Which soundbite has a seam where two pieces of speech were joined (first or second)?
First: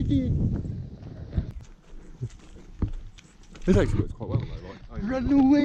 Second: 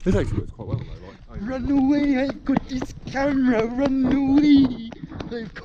first